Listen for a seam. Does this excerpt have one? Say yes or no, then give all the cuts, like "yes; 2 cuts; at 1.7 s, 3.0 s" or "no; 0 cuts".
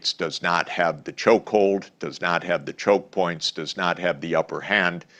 no; 0 cuts